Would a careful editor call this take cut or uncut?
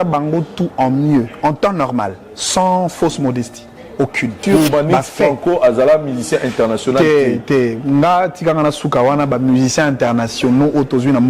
cut